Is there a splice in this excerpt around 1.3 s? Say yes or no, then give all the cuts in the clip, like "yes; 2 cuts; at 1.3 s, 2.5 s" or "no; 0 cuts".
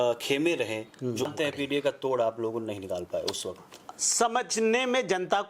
yes; 1 cut; at 1.3 s